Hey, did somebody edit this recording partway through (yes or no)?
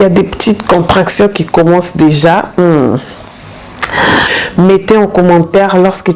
yes